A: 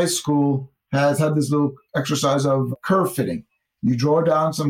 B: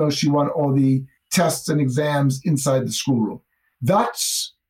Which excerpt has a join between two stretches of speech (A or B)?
B